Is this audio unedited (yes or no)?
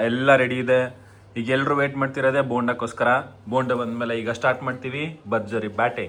yes